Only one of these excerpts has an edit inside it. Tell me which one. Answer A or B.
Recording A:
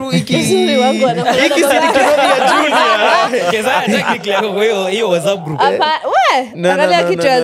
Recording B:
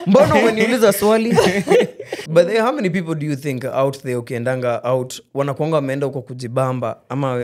B